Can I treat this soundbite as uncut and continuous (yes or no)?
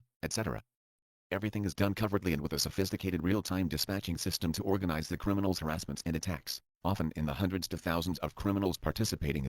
no